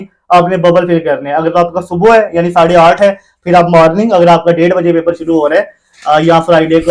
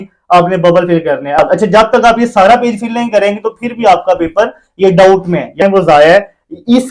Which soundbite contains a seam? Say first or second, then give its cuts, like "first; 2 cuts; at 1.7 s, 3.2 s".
second; 2 cuts; at 1.4 s, 5.6 s